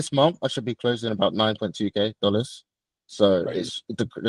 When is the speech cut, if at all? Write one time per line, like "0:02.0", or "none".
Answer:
none